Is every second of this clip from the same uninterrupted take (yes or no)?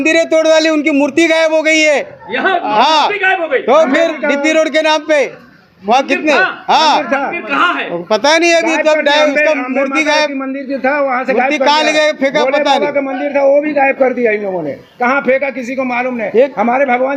yes